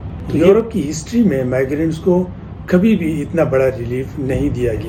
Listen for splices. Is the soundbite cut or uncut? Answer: uncut